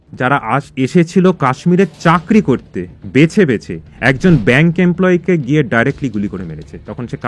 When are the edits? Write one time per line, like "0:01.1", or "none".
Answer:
none